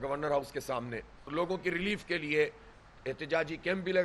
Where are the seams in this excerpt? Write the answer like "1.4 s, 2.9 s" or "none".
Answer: 1.3 s